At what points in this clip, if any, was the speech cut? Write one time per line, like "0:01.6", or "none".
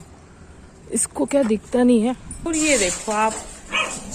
0:02.5